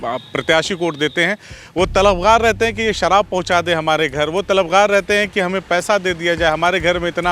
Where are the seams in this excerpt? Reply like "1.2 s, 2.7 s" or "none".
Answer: none

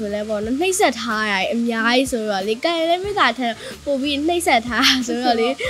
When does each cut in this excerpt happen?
none

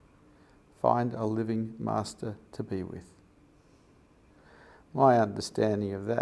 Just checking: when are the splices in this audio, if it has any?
3.3 s

